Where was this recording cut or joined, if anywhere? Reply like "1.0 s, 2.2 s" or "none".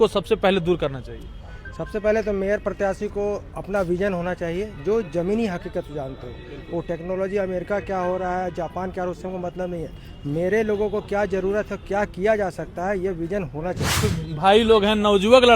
14.1 s